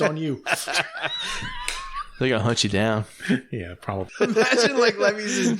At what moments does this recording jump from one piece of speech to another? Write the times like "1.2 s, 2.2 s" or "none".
4.0 s

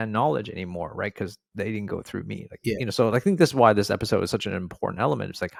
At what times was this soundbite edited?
none

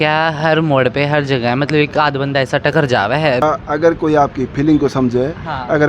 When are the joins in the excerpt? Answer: 3.4 s

